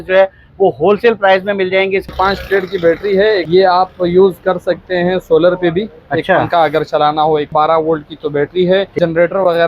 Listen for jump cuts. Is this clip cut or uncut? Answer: cut